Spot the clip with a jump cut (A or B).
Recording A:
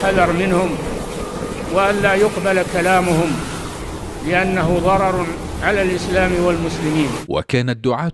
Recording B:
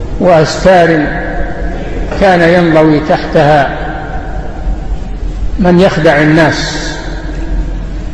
A